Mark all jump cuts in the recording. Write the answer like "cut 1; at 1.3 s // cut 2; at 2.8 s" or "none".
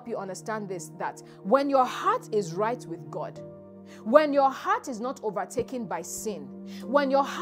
none